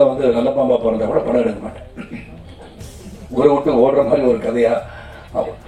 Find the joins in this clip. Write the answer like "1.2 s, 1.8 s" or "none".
3.1 s